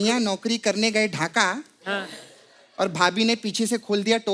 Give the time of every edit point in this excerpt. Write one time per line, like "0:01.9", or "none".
none